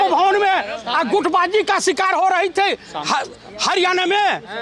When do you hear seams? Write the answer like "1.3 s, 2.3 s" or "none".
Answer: none

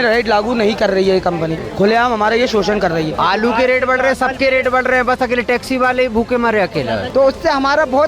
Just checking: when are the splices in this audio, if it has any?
1.6 s, 3.1 s, 7.0 s

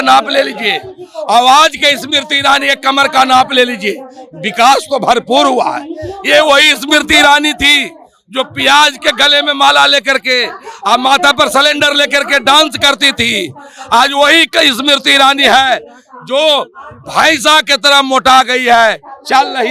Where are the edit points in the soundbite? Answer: none

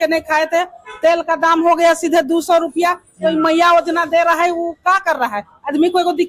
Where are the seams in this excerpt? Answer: none

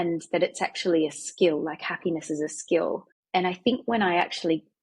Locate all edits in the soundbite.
3.1 s

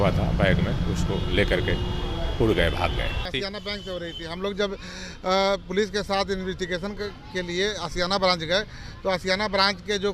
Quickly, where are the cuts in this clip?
3.3 s

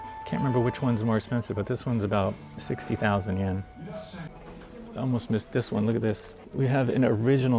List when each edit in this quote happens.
4.3 s, 6.4 s

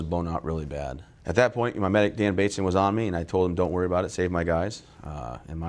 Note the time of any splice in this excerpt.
1.1 s

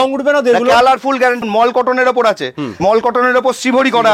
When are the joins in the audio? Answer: 1.4 s, 2.8 s

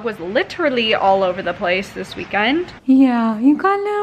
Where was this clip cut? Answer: 2.7 s

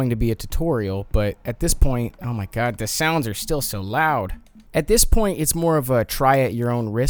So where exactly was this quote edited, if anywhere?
none

